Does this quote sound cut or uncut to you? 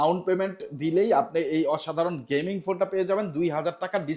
uncut